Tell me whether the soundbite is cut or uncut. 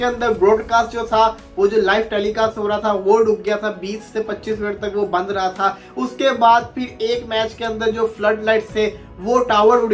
uncut